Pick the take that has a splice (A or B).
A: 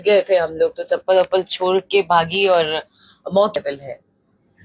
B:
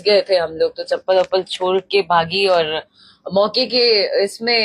A